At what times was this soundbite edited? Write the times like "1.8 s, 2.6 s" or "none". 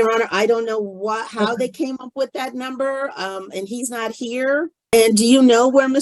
4.9 s